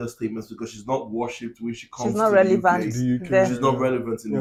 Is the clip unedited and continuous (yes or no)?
yes